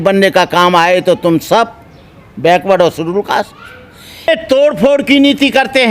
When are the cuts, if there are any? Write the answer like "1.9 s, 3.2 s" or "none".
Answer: 4.3 s